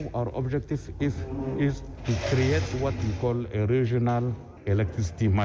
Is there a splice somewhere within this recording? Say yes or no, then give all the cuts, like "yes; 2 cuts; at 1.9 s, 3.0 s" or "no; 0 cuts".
yes; 2 cuts; at 1.9 s, 4.5 s